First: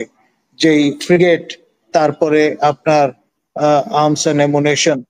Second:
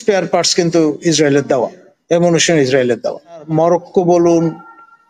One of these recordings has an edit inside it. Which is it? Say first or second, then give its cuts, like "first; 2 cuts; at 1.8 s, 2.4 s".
second; 1 cut; at 3.5 s